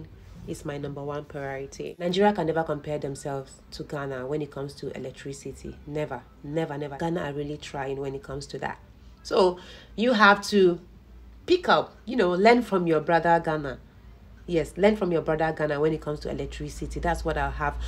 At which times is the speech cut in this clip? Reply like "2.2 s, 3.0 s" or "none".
2.0 s

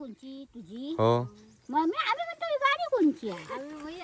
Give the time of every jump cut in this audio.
none

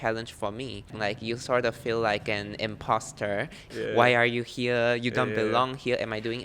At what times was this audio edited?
0.9 s, 3.7 s

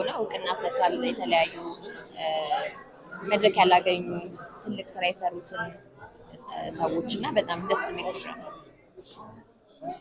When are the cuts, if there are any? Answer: none

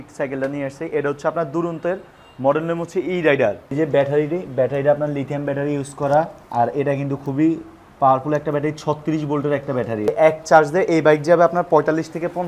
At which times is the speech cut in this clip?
3.7 s, 10.1 s

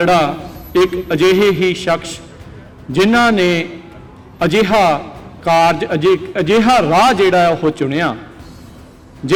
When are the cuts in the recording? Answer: none

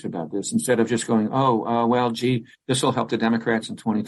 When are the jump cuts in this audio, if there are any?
none

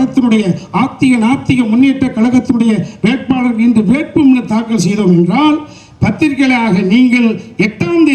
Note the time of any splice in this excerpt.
none

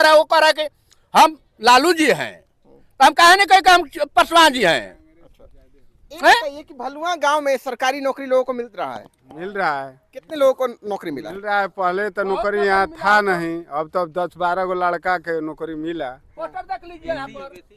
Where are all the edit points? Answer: none

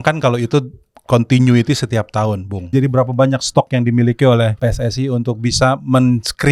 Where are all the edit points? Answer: 2.7 s, 4.5 s

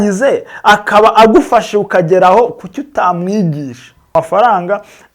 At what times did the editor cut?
4.1 s

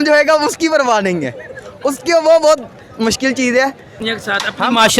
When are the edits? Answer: 4.0 s

